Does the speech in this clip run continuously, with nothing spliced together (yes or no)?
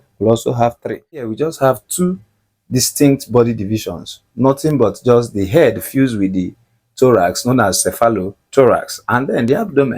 no